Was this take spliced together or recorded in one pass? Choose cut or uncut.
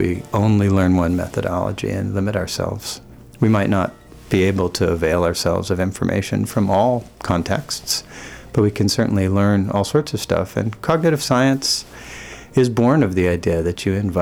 uncut